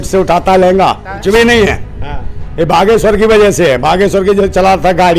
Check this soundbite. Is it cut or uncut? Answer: cut